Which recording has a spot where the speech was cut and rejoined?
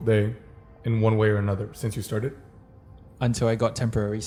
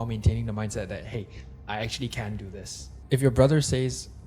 second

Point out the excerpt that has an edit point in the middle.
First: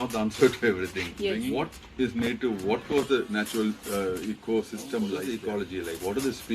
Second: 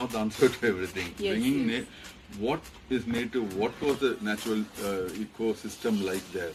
first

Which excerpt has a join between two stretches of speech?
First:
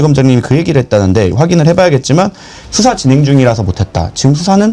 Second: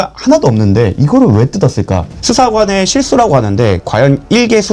second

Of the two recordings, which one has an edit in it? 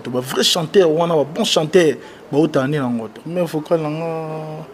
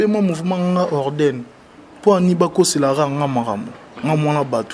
first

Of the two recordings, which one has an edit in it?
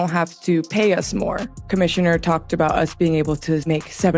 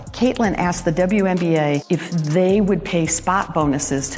first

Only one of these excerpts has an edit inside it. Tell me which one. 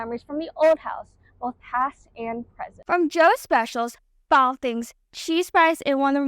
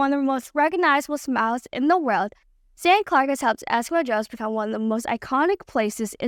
first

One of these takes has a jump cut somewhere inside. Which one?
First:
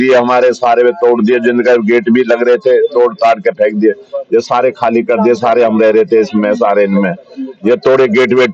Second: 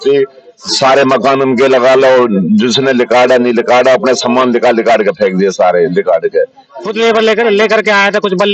second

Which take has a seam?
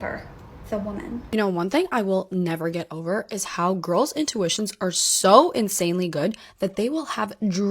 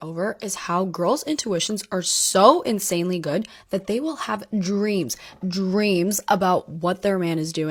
first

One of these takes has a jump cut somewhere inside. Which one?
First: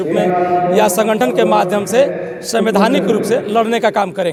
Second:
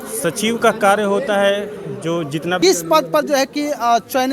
second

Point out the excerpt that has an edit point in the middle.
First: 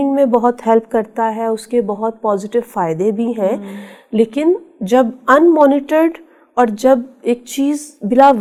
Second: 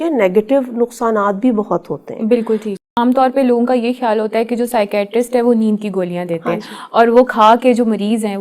second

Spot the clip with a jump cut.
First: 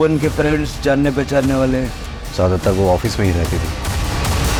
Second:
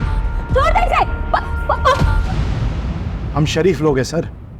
second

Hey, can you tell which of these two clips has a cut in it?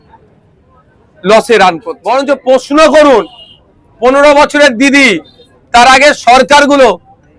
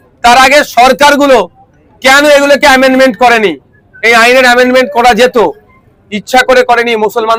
first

